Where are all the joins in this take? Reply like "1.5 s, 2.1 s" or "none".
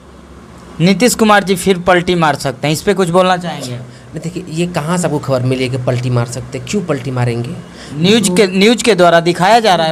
none